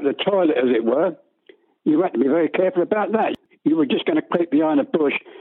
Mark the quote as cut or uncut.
cut